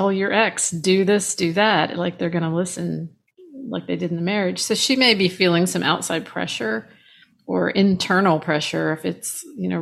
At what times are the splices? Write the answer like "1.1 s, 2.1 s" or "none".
none